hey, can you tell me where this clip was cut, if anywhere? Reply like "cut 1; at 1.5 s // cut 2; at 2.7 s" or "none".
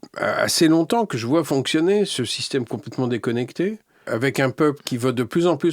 cut 1; at 4.0 s